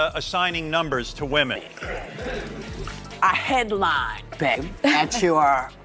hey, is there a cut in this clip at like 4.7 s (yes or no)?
yes